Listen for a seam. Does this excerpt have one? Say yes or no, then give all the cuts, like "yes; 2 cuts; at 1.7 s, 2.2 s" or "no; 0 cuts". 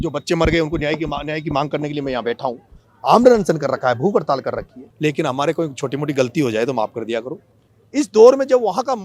yes; 2 cuts; at 4.8 s, 7.7 s